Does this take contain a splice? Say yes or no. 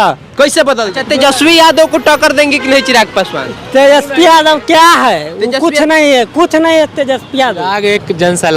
yes